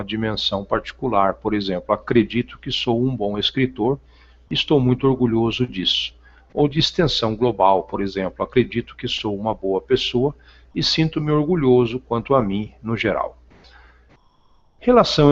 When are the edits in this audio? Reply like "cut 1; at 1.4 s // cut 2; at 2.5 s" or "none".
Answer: none